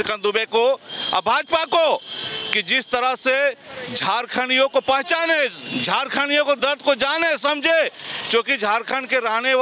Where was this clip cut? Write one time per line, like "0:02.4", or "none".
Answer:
none